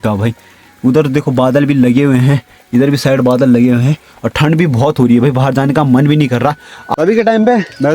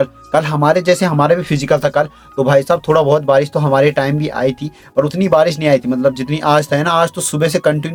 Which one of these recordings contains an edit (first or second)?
first